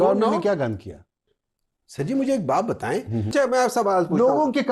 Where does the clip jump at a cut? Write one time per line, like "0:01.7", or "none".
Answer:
0:03.5